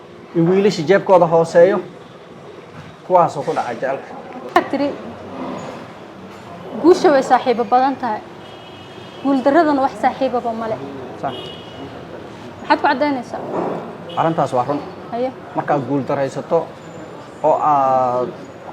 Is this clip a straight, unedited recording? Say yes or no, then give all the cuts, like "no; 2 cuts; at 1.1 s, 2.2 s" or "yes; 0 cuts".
no; 1 cut; at 4.6 s